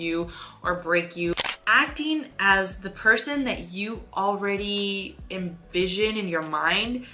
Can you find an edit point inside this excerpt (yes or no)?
yes